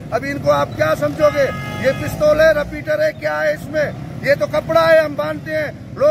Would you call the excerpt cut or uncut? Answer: uncut